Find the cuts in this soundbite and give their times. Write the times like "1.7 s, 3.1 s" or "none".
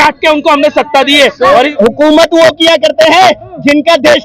1.5 s